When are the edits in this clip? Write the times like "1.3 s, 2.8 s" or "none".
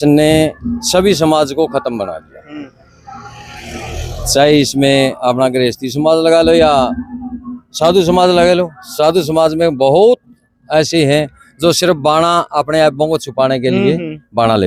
none

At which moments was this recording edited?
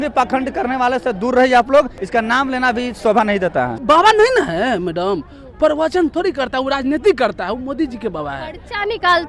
2.0 s, 3.8 s

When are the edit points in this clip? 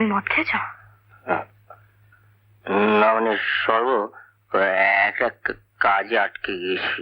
none

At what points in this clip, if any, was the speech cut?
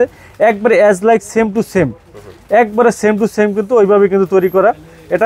none

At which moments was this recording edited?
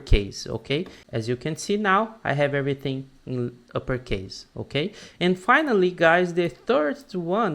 1.0 s

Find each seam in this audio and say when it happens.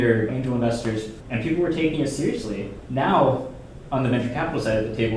1.3 s, 2.8 s

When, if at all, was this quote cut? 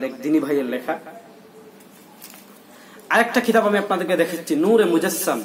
none

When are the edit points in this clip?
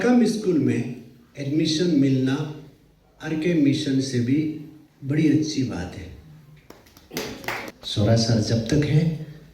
7.8 s

